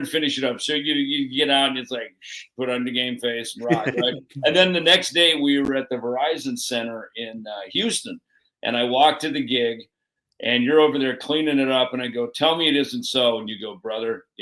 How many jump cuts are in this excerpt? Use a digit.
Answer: 0